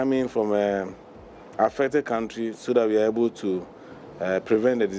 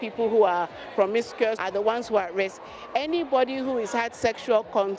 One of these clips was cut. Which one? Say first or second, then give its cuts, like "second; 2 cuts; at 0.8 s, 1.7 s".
second; 1 cut; at 1.6 s